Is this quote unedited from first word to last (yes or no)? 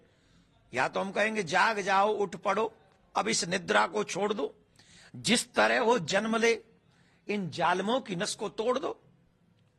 yes